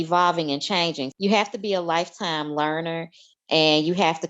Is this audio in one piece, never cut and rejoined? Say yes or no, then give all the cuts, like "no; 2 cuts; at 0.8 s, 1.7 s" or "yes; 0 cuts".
no; 1 cut; at 1.1 s